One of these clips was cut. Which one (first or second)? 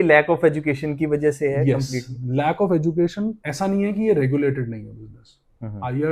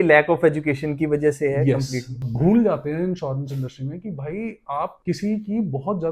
second